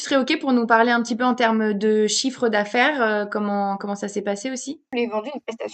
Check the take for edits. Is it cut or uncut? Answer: cut